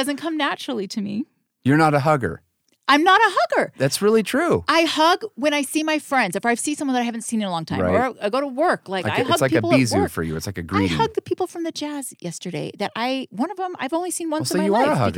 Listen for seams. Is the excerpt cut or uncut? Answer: uncut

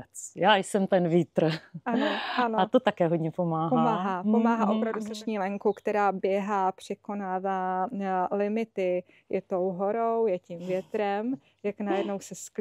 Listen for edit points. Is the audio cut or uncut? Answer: cut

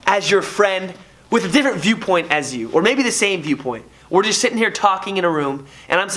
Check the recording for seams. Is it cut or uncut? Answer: uncut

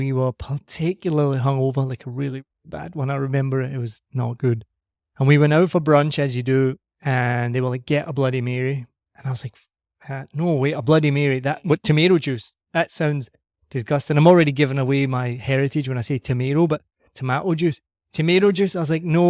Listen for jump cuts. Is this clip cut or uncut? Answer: uncut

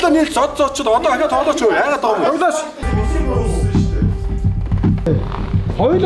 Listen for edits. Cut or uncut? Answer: cut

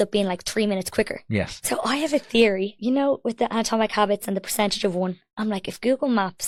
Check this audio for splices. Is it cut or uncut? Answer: uncut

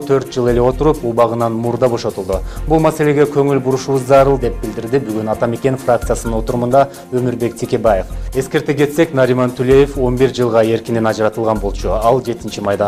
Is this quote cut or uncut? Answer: uncut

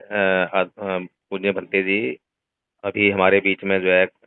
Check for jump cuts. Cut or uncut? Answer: uncut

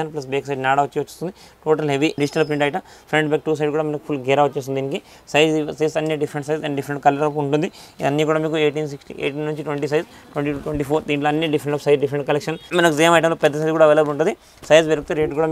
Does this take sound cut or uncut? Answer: uncut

